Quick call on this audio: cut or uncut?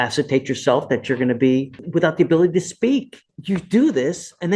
cut